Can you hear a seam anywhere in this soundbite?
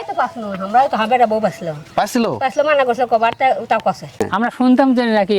yes; 1 cut; at 4.2 s

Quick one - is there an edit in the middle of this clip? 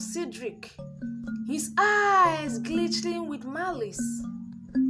no; 0 cuts

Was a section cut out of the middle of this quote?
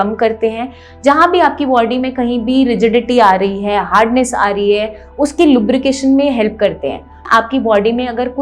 yes; 1 cut; at 7.2 s

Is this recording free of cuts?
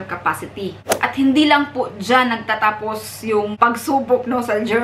no; 2 cuts; at 0.9 s, 3.5 s

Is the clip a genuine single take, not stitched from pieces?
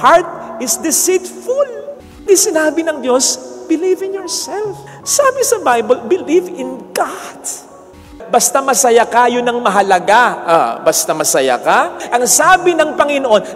no; 3 cuts; at 2.2 s, 8.0 s, 12.0 s

